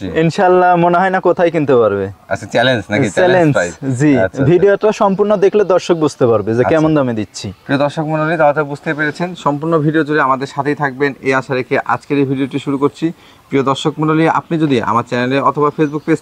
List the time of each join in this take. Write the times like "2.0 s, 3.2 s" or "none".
none